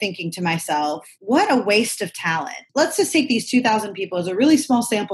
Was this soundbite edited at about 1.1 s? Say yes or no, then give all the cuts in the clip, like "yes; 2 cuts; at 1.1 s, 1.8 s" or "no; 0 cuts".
yes; 2 cuts; at 1.1 s, 2.6 s